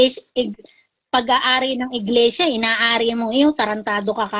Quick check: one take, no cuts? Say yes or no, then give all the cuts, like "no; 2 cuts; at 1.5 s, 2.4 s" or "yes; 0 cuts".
yes; 0 cuts